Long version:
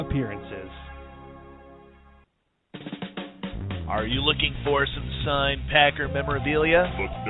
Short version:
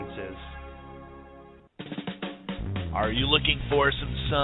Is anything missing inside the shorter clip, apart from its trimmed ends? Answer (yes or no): yes